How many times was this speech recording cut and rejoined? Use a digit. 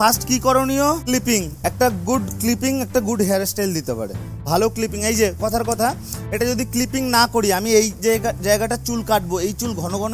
1